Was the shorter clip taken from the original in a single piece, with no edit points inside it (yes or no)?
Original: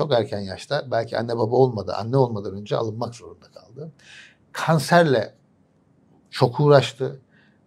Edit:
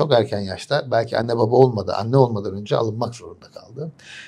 yes